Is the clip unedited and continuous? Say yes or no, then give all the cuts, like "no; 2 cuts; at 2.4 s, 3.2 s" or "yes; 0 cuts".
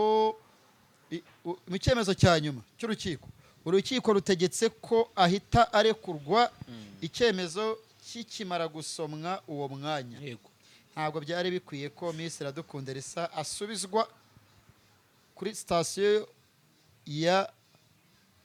yes; 0 cuts